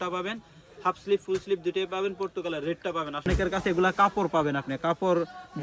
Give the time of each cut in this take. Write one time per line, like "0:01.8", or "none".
0:03.3